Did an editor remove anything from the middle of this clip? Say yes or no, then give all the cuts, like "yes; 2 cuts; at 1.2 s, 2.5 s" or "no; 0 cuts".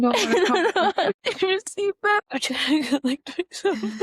yes; 2 cuts; at 1.2 s, 2.3 s